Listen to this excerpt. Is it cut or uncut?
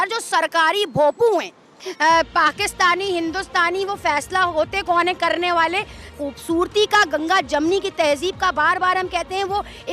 cut